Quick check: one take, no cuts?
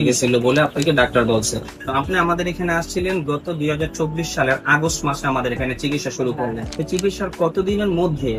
no; 2 cuts; at 1.8 s, 6.7 s

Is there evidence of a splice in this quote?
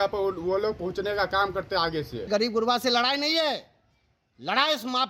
yes; 1 cut; at 2.3 s

